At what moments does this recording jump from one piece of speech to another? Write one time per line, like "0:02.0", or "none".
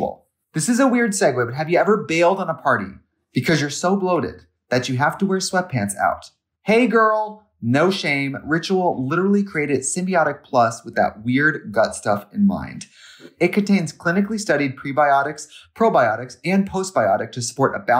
none